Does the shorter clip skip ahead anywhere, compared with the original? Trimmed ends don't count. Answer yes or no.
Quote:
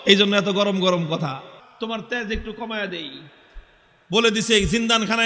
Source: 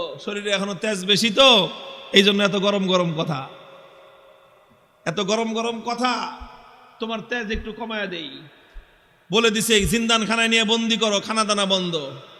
yes